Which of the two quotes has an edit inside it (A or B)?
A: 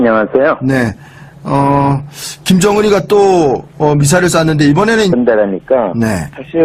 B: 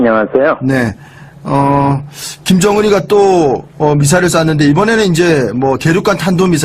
B